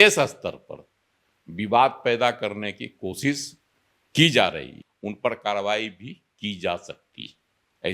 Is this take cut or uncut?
cut